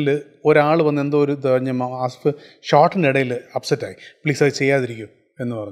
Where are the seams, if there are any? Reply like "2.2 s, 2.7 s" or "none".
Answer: none